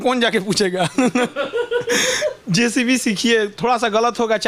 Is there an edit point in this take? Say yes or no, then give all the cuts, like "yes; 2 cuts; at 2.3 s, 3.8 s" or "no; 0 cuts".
no; 0 cuts